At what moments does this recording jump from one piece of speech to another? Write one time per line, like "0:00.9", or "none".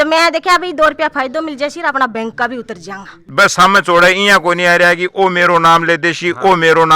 0:03.2